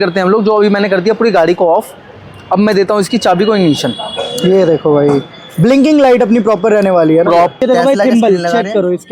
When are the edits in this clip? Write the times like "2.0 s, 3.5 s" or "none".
7.6 s